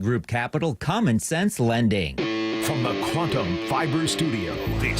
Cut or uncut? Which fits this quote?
cut